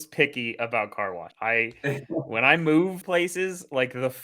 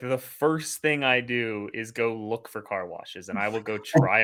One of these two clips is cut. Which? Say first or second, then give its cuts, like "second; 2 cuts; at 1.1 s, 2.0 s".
first; 2 cuts; at 1.3 s, 3.0 s